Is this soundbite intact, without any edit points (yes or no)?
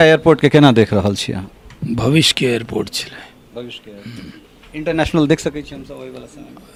yes